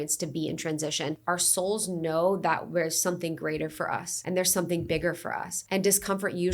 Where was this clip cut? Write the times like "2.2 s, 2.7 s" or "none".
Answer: 1.2 s, 4.1 s, 5.5 s